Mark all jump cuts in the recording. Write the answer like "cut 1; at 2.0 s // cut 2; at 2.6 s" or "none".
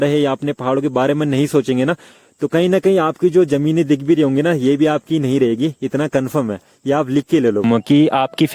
cut 1; at 7.6 s